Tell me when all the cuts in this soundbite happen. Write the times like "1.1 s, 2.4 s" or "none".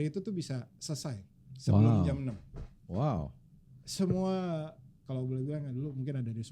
none